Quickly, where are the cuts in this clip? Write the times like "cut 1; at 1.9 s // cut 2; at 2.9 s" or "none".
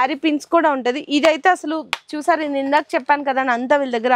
none